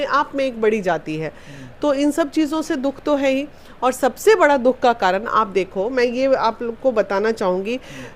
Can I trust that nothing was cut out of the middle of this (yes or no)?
yes